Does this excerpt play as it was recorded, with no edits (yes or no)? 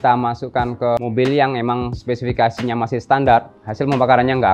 no